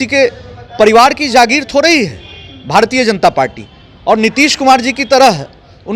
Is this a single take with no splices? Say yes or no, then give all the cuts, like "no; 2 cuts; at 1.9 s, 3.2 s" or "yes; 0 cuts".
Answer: yes; 0 cuts